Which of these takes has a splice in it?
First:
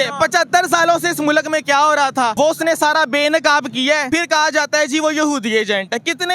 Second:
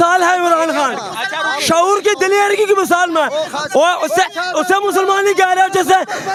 first; 2 cuts; at 2.3 s, 4.0 s

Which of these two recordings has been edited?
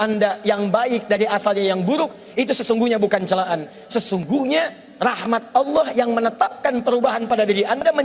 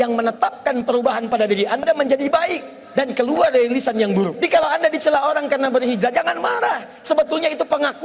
second; 1 cut; at 4.3 s

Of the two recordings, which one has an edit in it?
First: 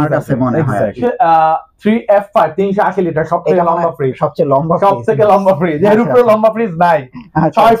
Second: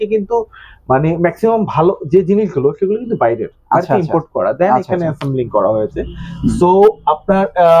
first; 1 cut; at 1.0 s

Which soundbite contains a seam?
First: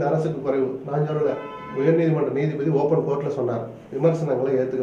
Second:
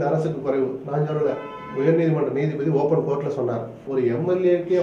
second; 1 cut; at 3.8 s

